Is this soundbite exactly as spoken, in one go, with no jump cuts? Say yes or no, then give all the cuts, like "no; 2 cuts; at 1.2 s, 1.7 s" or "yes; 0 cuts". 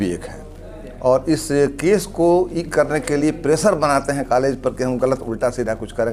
yes; 0 cuts